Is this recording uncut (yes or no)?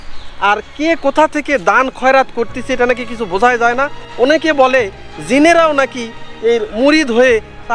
no